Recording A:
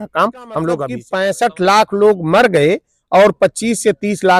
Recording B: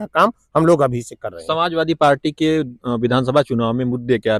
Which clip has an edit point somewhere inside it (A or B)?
A